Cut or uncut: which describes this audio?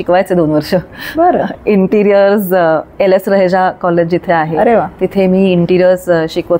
uncut